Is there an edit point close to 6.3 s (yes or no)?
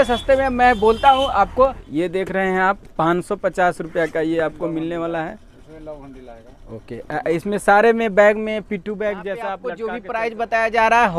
no